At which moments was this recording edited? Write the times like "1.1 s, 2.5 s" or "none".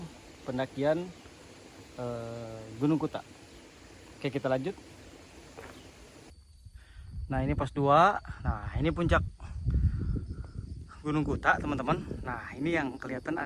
6.3 s